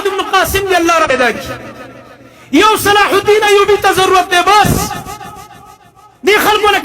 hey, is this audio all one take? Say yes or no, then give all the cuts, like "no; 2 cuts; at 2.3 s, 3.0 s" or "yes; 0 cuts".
no; 1 cut; at 1.1 s